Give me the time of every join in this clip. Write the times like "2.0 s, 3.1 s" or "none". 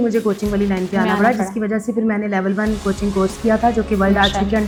none

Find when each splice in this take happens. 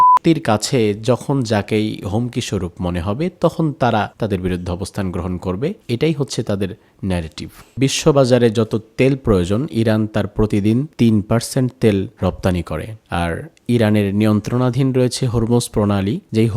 4.1 s, 5.8 s, 7.7 s

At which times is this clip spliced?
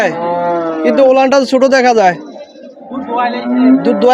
none

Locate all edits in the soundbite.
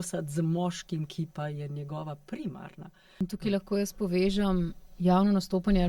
3.2 s

